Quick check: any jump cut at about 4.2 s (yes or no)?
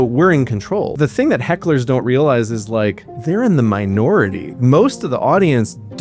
no